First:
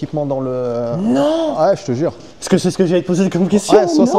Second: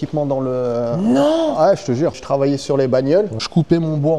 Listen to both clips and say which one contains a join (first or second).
second